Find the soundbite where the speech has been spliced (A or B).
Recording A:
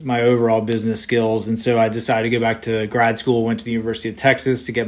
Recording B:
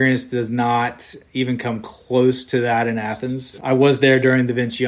B